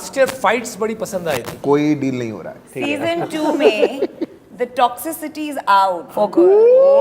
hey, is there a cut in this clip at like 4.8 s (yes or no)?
no